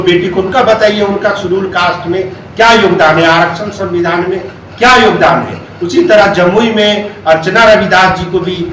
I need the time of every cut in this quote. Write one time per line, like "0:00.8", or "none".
none